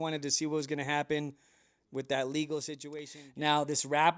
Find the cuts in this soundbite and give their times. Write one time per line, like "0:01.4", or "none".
0:02.8